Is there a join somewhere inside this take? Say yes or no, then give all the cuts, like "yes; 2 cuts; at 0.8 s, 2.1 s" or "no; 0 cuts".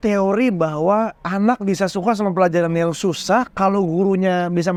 no; 0 cuts